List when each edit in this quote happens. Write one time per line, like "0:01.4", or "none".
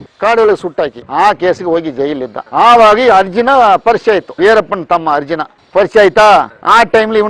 0:01.0
0:04.3